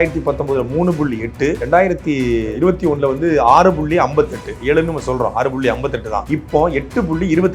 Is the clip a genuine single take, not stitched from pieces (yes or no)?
no